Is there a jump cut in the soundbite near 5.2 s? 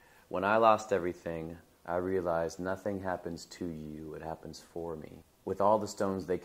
yes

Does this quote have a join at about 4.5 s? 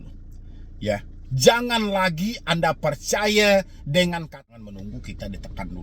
yes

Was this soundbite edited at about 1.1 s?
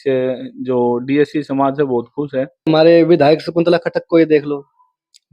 no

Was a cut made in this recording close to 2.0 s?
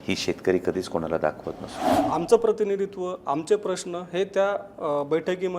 yes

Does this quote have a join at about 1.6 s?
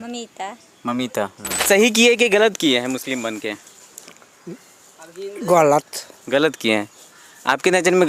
yes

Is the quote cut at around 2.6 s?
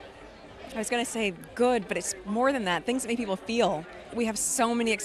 no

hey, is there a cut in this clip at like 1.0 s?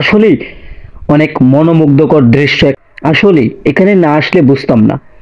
no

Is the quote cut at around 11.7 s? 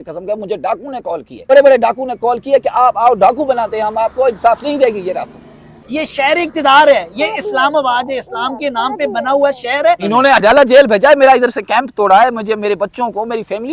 no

